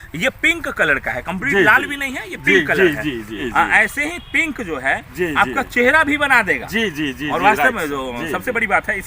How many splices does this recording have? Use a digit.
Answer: 1